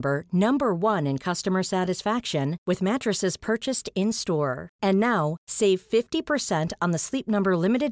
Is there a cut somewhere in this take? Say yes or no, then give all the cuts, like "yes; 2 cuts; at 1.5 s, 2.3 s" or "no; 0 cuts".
no; 0 cuts